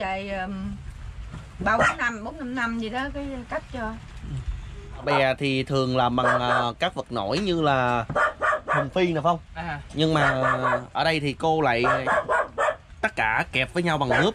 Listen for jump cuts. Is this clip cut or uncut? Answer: cut